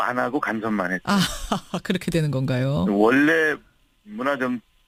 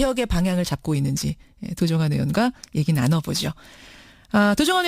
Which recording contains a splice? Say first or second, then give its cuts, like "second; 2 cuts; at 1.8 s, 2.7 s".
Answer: second; 1 cut; at 1.3 s